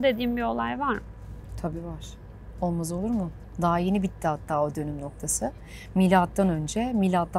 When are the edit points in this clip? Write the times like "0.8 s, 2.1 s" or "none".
none